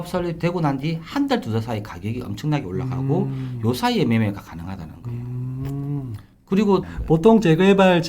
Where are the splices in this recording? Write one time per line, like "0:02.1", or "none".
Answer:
0:06.9